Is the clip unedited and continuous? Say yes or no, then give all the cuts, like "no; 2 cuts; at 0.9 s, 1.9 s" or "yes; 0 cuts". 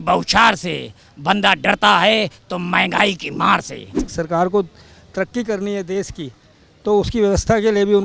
no; 1 cut; at 4.1 s